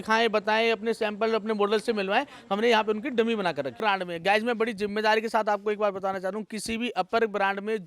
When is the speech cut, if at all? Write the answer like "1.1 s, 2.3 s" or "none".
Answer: 3.8 s